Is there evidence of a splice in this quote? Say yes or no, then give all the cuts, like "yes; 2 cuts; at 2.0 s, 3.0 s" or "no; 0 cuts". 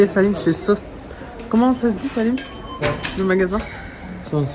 no; 0 cuts